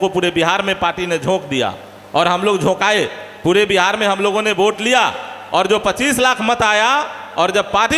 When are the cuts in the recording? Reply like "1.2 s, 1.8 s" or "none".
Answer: none

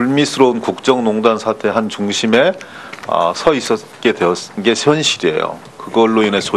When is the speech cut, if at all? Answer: none

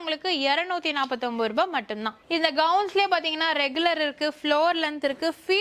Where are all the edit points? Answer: 2.2 s

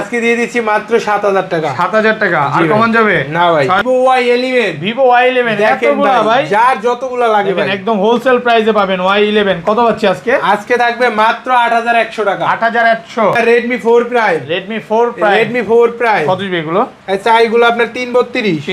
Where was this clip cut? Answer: 3.8 s, 13.3 s

